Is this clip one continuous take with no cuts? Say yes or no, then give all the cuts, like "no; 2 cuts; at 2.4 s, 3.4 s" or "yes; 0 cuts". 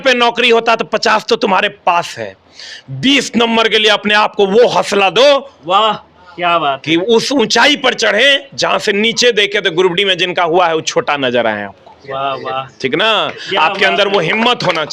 yes; 0 cuts